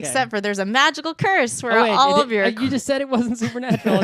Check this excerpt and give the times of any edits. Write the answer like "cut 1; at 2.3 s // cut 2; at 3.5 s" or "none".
cut 1; at 2.3 s